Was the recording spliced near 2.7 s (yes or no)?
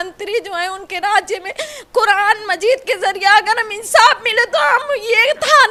no